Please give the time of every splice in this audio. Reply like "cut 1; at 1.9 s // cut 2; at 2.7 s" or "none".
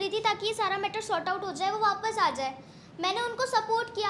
none